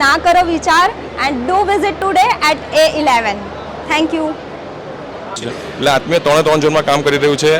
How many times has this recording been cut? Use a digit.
1